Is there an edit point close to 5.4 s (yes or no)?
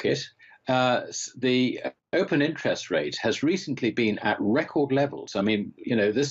no